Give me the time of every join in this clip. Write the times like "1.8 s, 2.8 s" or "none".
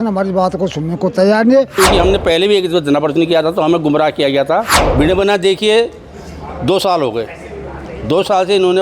1.7 s, 4.8 s